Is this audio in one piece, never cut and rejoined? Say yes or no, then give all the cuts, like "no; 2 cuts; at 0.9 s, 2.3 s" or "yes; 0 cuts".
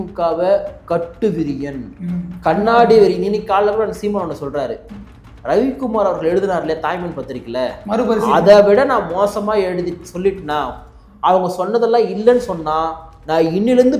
yes; 0 cuts